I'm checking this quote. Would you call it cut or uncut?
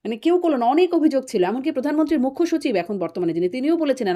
uncut